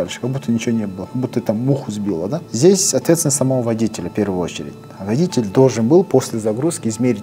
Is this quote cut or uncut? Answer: cut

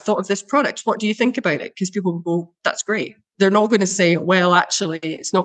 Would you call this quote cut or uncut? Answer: cut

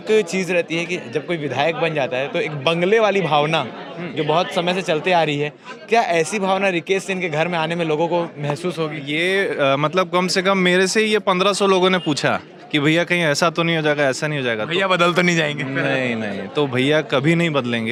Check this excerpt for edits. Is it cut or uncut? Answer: uncut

